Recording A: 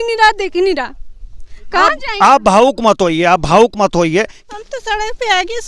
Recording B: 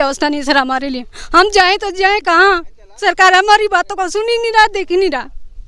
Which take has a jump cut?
A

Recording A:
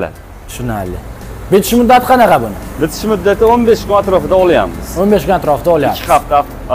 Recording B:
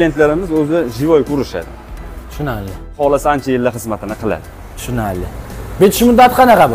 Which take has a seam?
B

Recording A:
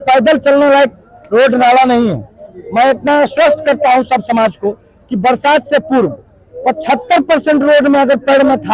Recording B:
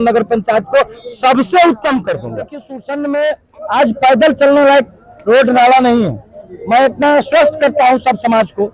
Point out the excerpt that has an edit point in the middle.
B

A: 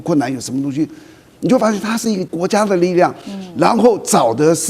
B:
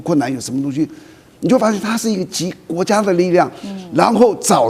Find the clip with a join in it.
A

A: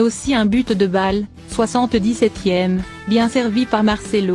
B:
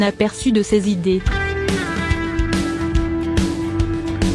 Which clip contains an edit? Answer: B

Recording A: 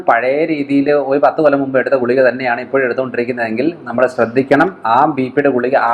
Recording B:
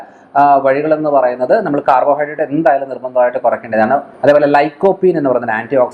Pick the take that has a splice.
B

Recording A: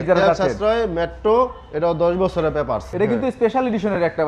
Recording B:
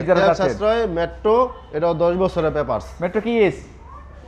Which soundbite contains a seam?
A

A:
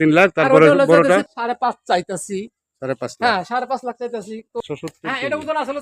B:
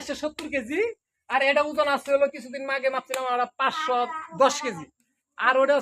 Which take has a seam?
A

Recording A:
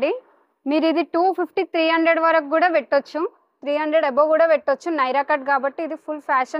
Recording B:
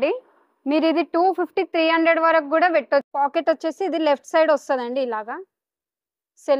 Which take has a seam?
B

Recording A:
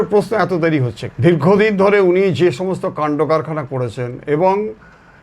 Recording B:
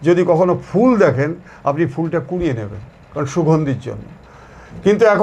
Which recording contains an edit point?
A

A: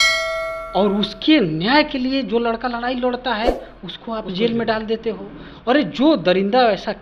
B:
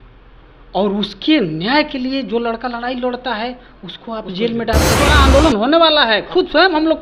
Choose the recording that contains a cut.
B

